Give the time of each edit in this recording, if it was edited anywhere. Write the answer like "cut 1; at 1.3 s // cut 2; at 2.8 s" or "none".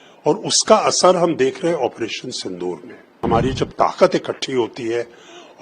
cut 1; at 3.2 s